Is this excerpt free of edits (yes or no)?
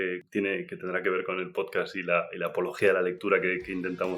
yes